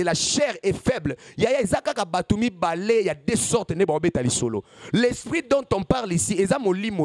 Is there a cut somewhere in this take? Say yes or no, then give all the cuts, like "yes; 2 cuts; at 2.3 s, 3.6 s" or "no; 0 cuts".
no; 0 cuts